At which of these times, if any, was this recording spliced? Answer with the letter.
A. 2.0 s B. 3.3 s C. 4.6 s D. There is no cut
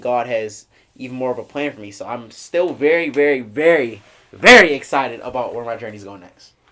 D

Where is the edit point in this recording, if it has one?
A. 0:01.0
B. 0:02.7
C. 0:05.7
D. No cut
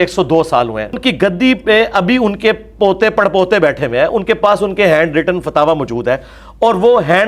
A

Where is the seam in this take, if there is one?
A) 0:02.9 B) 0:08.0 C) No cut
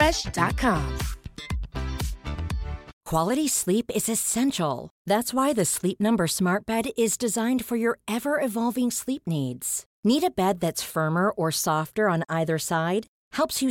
A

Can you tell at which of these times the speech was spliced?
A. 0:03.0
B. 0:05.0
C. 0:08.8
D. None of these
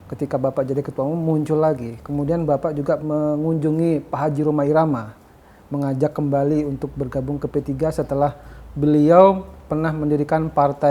A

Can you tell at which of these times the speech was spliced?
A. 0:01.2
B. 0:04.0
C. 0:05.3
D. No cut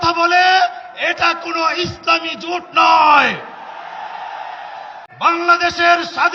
C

